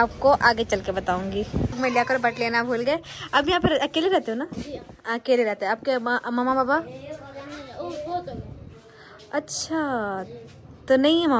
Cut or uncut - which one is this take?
cut